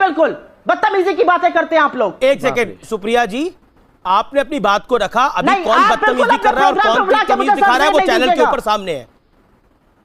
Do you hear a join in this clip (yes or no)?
no